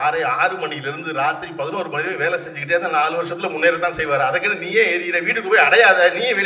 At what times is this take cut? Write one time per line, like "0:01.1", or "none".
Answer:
none